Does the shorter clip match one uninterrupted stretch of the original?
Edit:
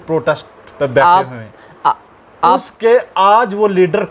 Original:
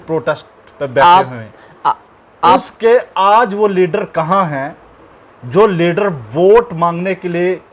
yes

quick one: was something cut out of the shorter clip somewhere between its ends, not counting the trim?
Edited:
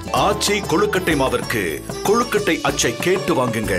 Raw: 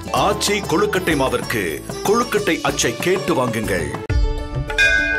no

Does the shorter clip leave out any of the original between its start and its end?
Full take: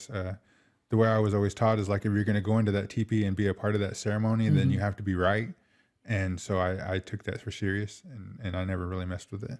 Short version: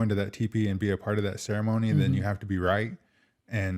no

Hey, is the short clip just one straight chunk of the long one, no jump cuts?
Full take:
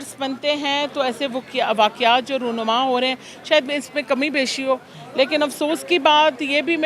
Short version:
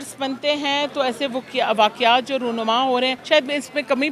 no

